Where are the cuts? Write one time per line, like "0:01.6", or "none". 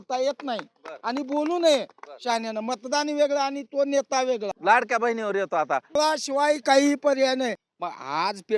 0:04.5
0:05.9
0:07.6